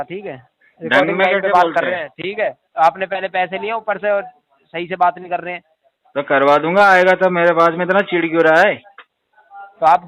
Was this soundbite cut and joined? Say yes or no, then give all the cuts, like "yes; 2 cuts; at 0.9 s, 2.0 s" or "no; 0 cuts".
no; 0 cuts